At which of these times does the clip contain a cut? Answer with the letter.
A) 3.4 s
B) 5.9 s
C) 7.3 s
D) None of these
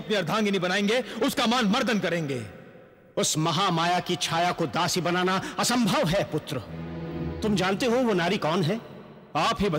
C